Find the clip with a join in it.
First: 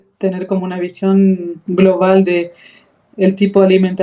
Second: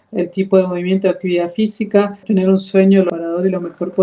second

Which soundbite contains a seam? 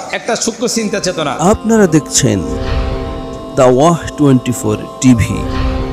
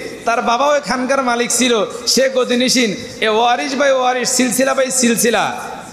first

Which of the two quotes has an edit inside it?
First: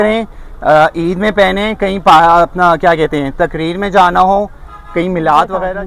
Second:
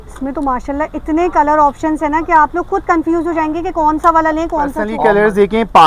second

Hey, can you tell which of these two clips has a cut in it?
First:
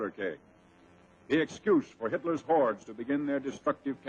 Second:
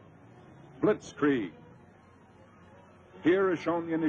second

